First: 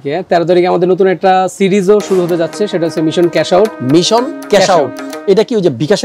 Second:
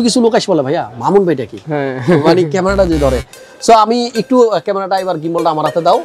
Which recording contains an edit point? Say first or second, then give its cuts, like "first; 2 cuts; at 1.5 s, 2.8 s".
first; 1 cut; at 3.8 s